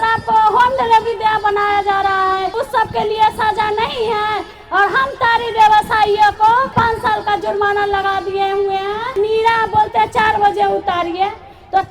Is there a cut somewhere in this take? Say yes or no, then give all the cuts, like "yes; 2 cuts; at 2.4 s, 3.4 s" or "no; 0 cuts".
yes; 3 cuts; at 2.6 s, 6.7 s, 9.1 s